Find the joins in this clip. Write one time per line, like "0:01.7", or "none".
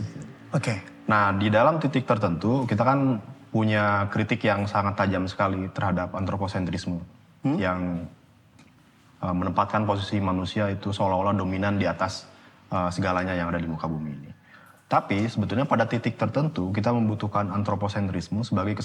none